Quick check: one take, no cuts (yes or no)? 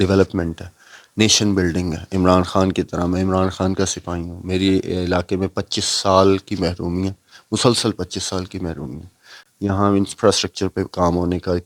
yes